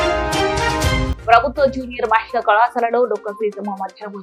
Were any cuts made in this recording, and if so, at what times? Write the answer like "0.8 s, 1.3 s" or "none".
1.1 s